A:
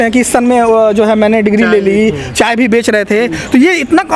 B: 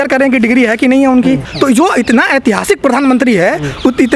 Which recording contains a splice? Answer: B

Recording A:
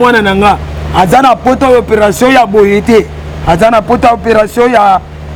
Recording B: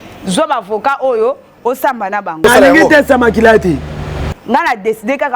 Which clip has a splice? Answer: B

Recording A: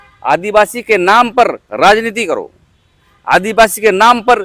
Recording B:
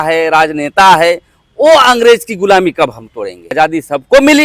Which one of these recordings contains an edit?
B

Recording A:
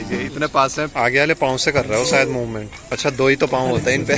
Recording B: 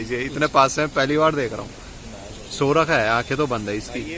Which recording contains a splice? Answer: A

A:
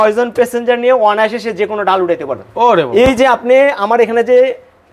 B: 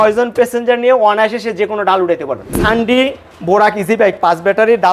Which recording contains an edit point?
B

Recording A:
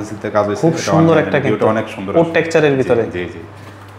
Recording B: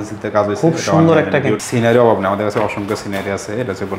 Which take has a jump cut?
B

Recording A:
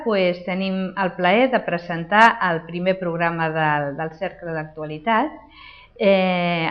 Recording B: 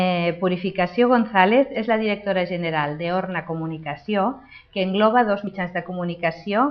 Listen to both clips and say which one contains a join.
B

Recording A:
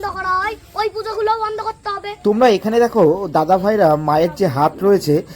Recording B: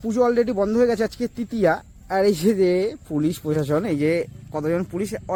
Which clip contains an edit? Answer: A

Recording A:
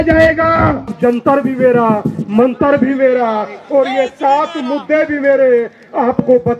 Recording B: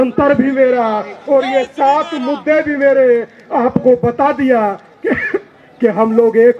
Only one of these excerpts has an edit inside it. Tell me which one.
A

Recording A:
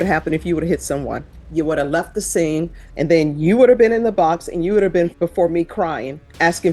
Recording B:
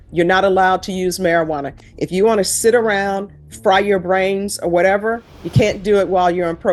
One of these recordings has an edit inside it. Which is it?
A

